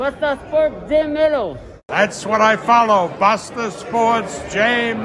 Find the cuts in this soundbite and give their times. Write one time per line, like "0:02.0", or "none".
0:01.0